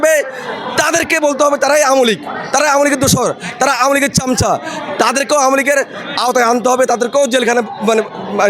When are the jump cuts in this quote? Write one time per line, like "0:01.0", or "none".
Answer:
none